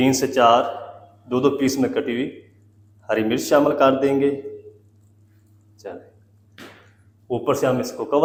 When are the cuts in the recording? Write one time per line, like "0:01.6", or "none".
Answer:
none